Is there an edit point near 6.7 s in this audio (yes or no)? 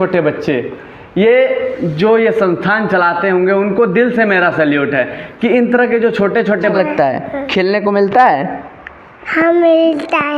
yes